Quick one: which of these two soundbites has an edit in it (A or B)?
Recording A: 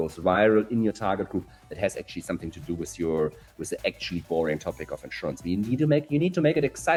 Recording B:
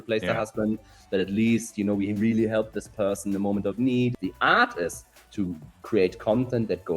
B